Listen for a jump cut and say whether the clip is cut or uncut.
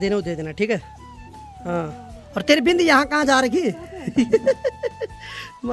uncut